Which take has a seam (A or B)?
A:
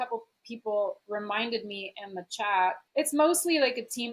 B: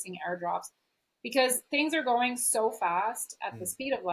A